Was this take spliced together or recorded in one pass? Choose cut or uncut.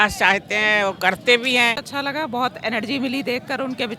cut